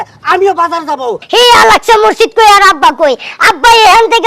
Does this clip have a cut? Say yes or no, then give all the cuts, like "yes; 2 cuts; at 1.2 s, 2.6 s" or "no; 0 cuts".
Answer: yes; 1 cut; at 1.2 s